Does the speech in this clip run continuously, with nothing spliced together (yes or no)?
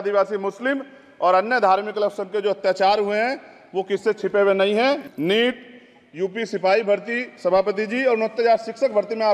no